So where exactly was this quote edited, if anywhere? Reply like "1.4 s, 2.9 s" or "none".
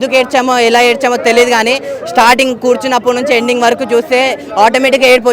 none